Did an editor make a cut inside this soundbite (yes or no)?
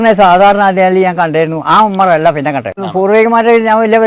yes